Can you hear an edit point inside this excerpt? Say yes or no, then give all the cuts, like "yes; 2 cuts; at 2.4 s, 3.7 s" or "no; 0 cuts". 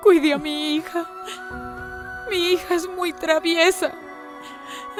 no; 0 cuts